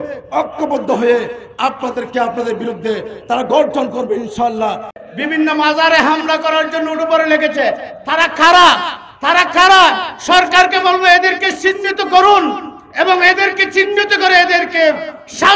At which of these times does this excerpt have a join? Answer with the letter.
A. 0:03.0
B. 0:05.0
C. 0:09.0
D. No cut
B